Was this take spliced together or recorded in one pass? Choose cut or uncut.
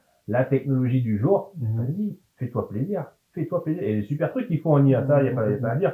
uncut